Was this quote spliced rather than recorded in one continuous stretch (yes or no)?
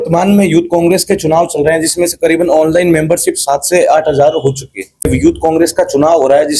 yes